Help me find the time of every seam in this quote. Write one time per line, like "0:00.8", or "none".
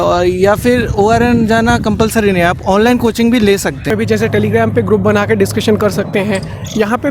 0:03.9